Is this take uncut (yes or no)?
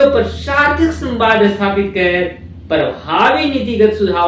yes